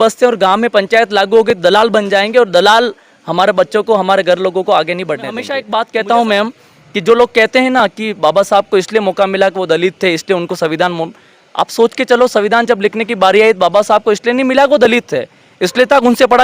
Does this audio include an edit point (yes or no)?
yes